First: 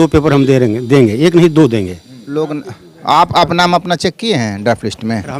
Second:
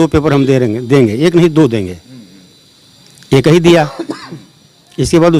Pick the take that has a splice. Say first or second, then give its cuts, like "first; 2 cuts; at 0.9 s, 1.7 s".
first; 1 cut; at 2.4 s